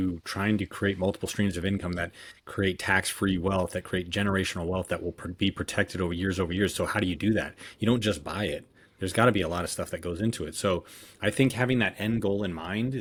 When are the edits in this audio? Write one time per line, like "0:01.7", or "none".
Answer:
none